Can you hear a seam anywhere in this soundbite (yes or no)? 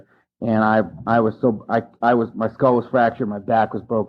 no